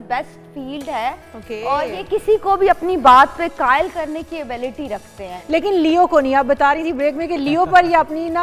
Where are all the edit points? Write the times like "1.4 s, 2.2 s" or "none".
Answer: none